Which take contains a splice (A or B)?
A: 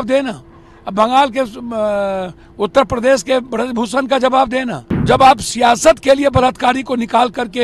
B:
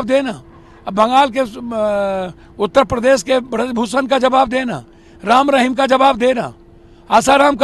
A